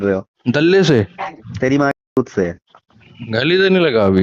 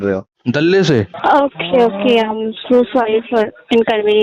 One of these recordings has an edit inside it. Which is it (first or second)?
second